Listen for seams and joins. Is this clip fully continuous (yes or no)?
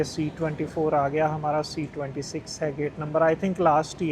yes